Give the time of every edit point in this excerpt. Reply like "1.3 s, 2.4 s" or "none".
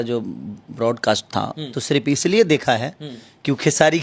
1.7 s